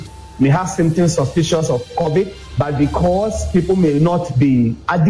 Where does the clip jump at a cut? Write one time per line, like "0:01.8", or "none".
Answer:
0:02.4